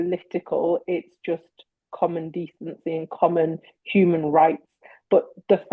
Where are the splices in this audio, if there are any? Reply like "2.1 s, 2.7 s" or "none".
none